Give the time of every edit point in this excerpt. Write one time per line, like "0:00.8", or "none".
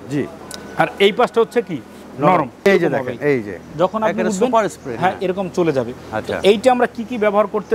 0:02.5